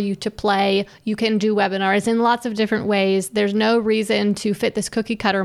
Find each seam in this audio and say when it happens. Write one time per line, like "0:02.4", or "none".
none

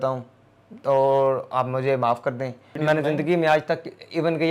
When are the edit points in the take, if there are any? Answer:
0:02.7

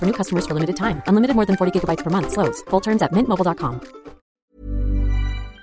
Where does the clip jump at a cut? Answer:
0:04.4

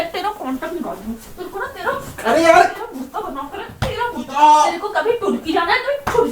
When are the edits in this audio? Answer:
none

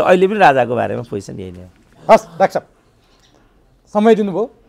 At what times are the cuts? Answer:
none

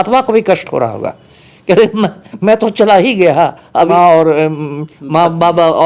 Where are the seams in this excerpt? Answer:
0:03.9

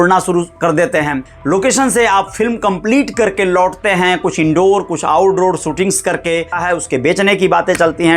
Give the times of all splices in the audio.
0:01.3
0:06.6

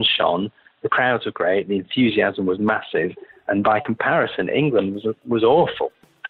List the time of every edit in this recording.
none

